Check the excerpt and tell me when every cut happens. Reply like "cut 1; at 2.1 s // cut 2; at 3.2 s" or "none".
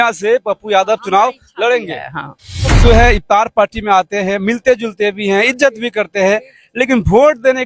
cut 1; at 2.8 s